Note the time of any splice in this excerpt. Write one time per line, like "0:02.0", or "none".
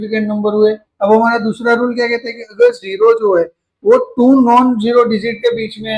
none